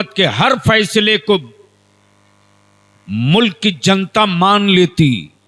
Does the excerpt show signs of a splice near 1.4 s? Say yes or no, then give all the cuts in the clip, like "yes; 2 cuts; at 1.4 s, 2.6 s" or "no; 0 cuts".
no; 0 cuts